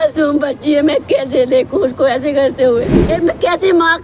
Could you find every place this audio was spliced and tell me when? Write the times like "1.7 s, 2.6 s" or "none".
3.0 s